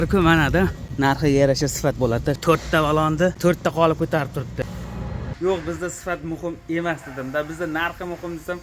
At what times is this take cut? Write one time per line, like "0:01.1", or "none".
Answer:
0:00.8
0:02.4
0:03.4
0:05.2